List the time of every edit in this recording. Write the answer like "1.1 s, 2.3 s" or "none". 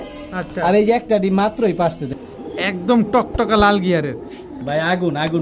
2.1 s

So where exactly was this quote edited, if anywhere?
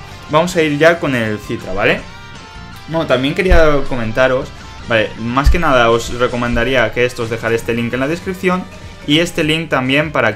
7.9 s

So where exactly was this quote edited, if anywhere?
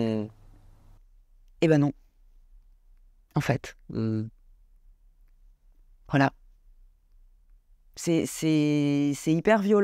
none

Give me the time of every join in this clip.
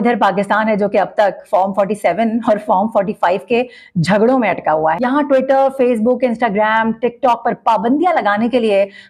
none

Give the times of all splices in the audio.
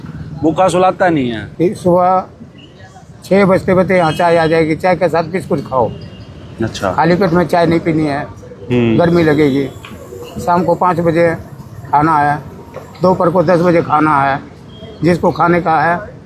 1.4 s

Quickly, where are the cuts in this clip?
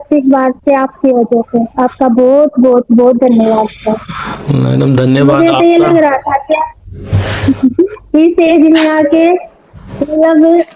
none

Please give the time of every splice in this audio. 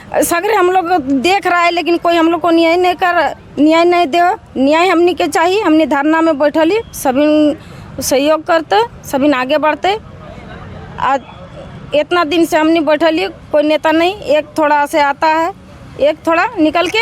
none

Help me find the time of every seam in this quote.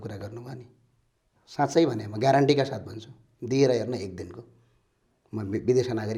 none

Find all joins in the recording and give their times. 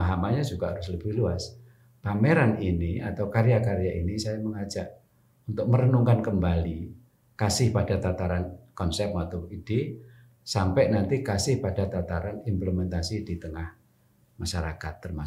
none

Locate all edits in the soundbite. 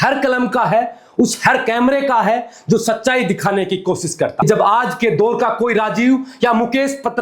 4.4 s

